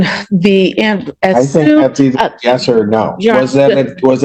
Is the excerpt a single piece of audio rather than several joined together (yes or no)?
yes